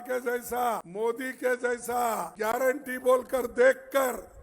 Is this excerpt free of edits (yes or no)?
no